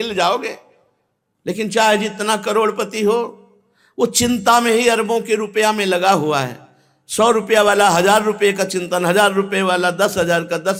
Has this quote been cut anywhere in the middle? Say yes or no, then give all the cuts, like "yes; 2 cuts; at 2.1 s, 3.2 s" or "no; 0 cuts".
no; 0 cuts